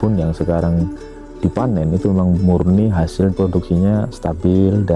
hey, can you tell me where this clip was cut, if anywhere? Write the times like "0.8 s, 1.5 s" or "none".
3.3 s